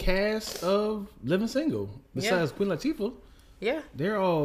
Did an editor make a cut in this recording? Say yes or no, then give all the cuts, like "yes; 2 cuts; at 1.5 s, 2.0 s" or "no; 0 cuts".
no; 0 cuts